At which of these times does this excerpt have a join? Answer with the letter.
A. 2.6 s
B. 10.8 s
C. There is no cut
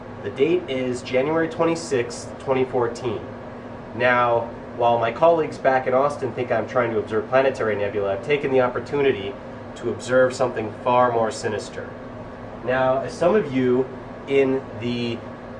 A